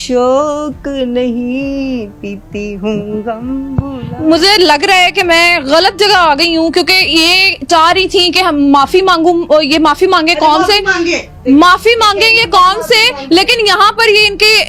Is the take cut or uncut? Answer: uncut